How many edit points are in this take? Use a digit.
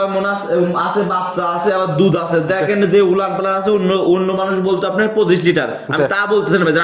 0